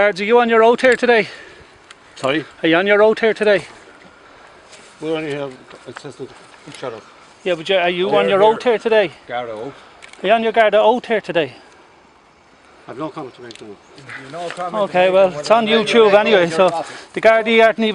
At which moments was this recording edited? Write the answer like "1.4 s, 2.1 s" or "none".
none